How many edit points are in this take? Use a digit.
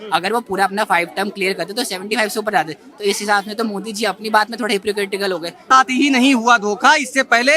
1